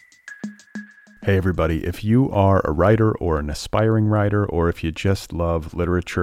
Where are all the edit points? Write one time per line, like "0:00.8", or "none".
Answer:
0:00.9